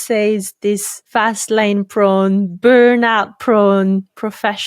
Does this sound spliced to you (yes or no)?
yes